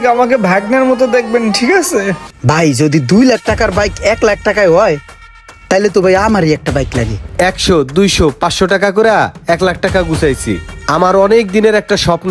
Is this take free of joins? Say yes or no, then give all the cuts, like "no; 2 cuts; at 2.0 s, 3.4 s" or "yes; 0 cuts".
no; 2 cuts; at 2.3 s, 7.2 s